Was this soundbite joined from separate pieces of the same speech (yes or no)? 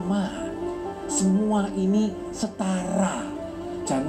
no